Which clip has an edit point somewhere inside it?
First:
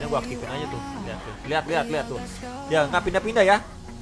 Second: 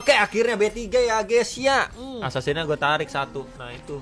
second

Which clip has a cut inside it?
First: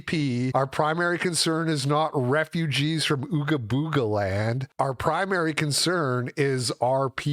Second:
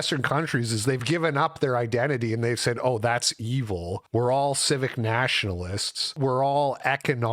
second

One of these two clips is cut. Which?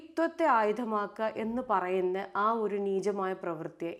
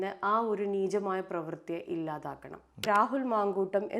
second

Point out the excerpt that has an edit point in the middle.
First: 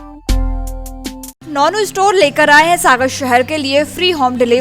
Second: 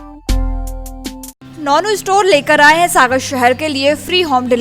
first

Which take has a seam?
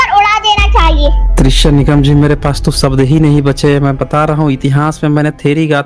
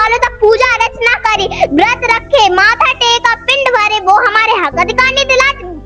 first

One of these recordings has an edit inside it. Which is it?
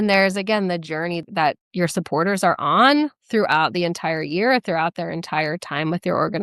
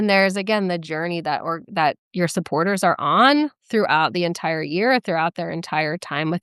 first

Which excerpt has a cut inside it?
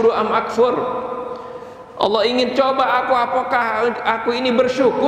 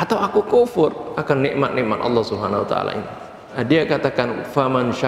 second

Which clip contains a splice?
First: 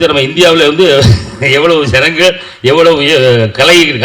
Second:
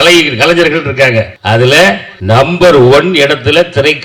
second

